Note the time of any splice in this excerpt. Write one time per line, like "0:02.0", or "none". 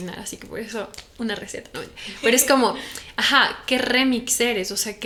none